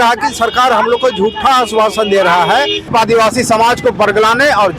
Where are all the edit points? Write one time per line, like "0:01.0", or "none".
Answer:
0:02.9